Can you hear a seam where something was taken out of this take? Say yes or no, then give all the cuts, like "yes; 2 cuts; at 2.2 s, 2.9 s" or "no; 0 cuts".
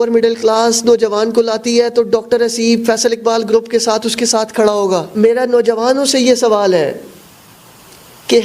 yes; 1 cut; at 5.1 s